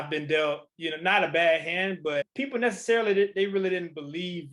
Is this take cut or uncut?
uncut